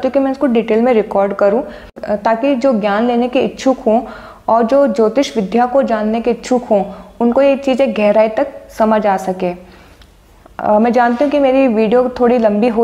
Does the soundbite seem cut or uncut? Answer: uncut